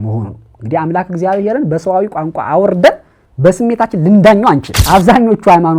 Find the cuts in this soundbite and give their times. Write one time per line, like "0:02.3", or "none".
0:04.7